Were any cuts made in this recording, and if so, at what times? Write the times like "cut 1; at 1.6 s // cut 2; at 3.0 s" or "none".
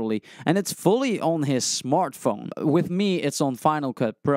cut 1; at 2.5 s